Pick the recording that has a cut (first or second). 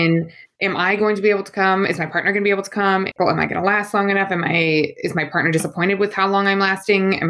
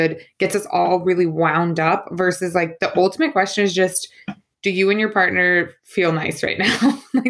first